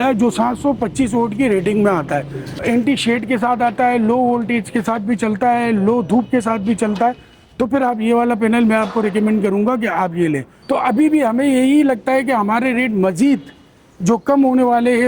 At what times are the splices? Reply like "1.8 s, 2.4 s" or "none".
2.6 s, 10.5 s